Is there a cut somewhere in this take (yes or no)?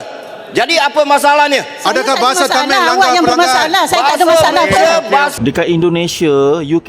yes